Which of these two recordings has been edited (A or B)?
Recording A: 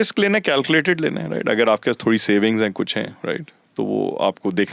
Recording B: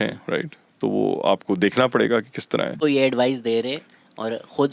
B